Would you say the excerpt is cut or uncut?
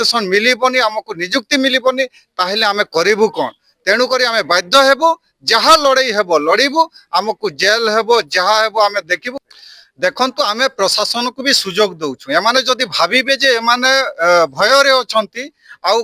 cut